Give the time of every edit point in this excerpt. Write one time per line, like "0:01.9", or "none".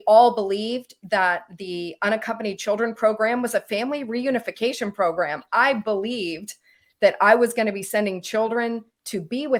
none